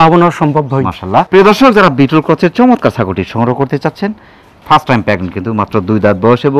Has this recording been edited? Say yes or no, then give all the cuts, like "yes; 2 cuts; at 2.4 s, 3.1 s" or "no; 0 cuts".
no; 0 cuts